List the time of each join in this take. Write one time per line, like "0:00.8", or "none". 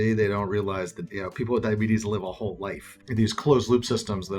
0:01.0
0:03.0